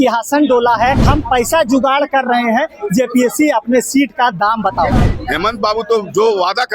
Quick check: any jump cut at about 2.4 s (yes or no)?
no